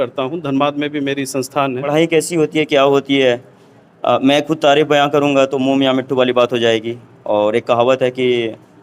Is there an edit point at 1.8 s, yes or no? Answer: yes